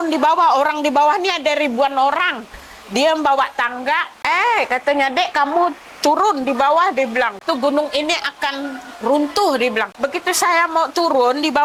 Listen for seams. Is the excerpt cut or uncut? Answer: cut